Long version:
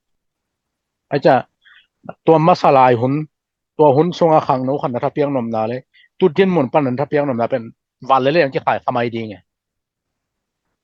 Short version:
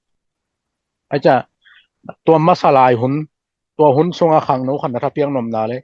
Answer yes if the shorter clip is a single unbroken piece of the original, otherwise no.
yes